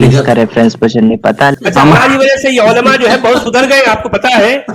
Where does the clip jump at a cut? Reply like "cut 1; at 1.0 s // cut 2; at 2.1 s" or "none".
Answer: cut 1; at 1.6 s

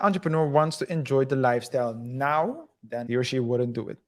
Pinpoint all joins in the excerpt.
cut 1; at 3.0 s

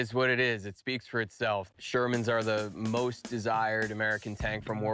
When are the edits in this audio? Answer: none

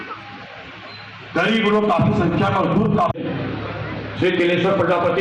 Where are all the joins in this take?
none

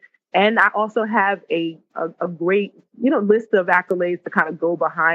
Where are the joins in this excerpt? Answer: cut 1; at 1.9 s // cut 2; at 2.8 s

